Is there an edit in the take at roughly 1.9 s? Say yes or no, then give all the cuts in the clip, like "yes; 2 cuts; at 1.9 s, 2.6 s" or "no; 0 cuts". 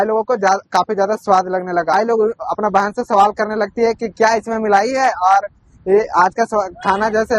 yes; 1 cut; at 1.9 s